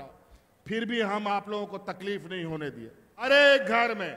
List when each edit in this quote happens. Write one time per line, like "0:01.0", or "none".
0:03.3